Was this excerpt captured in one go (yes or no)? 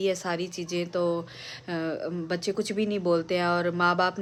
yes